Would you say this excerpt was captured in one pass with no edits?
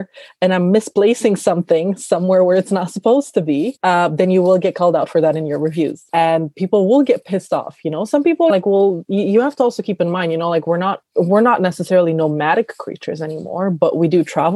no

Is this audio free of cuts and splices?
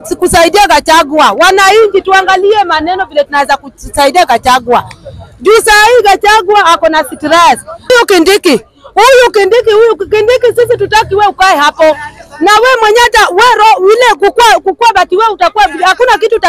no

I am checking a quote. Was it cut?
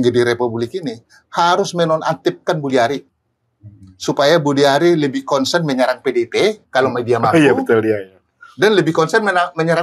no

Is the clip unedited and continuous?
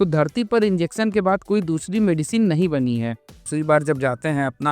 no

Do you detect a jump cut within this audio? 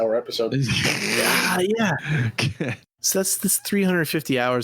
yes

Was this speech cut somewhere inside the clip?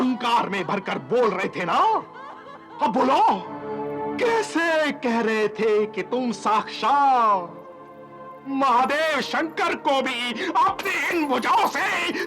yes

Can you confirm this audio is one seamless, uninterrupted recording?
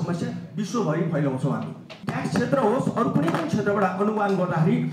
no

